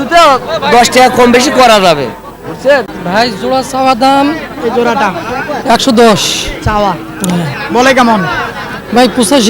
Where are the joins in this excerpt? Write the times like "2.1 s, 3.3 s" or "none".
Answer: 2.9 s